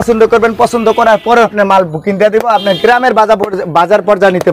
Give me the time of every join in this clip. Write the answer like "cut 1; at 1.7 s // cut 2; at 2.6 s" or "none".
cut 1; at 1.5 s